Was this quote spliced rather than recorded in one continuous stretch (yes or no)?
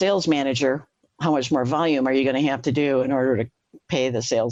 no